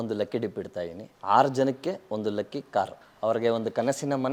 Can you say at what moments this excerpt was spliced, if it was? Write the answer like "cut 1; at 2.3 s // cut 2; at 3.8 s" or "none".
none